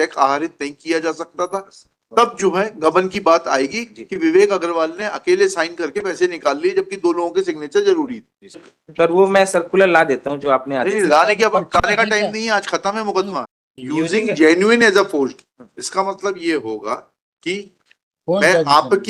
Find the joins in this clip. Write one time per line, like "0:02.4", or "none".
0:08.8
0:13.5